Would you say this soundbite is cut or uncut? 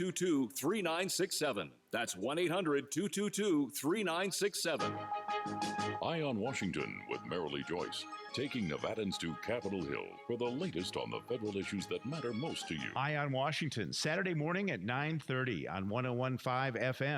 cut